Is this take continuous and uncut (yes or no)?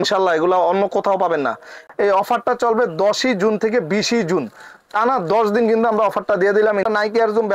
no